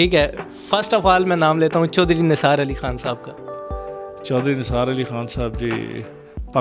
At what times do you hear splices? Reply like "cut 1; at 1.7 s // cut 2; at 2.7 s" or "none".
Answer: none